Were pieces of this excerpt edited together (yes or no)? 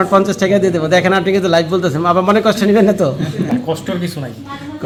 no